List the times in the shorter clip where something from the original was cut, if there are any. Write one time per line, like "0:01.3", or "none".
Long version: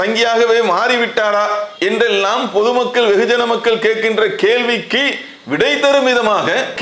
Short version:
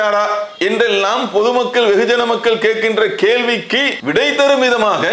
0:04.0